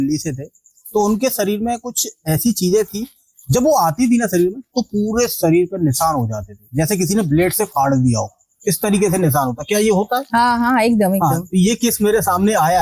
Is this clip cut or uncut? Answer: uncut